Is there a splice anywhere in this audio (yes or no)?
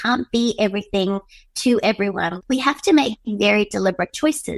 yes